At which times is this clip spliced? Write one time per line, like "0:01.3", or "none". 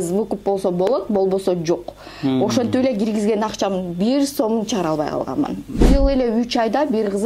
0:05.8